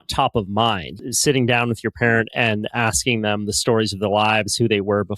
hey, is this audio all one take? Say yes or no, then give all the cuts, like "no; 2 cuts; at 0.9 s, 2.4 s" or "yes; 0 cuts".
no; 1 cut; at 0.9 s